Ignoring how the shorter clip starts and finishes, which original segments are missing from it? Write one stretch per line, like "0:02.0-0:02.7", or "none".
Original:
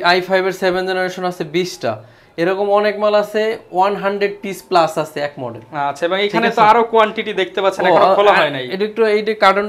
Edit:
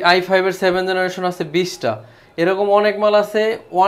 none